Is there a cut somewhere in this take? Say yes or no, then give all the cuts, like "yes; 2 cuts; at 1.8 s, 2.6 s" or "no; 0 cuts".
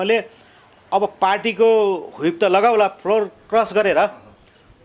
no; 0 cuts